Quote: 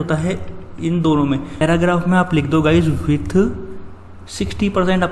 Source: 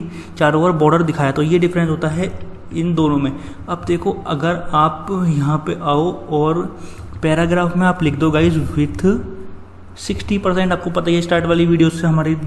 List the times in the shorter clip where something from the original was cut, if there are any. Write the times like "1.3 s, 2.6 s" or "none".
1.6 s

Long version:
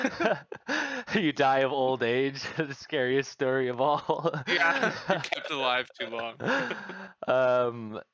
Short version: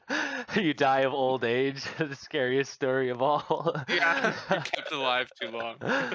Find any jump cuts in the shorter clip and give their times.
none

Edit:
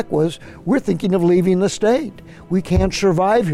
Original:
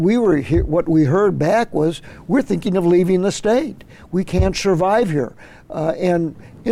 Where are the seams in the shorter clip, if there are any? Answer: none

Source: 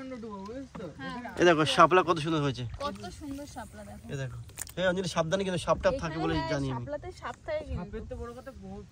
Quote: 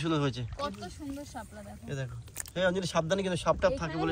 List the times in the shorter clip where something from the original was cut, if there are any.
none

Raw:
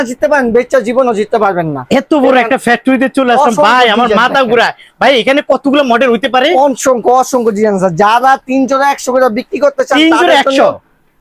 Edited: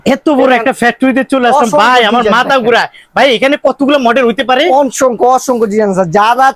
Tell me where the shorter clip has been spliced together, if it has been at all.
none

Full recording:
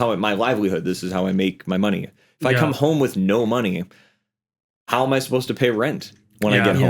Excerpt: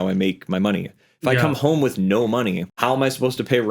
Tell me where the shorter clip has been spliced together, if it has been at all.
2.7 s

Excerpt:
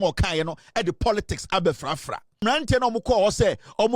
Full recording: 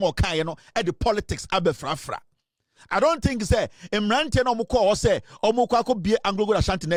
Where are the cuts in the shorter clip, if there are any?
2.4 s

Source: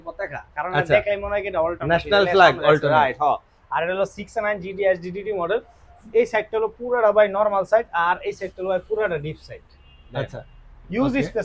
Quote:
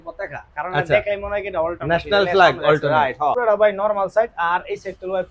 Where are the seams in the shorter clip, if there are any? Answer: 3.4 s

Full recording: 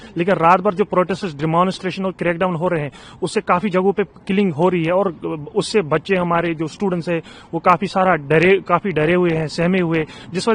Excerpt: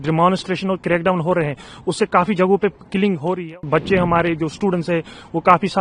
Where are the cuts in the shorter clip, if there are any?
3.6 s

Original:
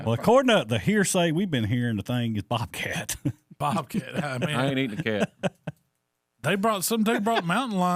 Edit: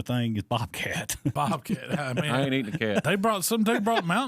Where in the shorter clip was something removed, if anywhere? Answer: 1.3 s, 3.0 s

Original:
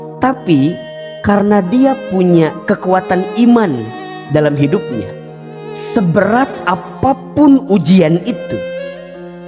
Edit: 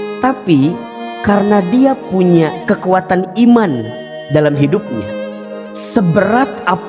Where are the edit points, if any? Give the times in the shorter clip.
none

